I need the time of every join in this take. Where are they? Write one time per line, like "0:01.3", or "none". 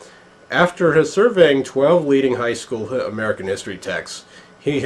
0:01.6